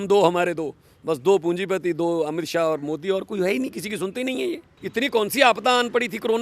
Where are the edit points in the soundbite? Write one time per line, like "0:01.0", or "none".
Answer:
0:04.7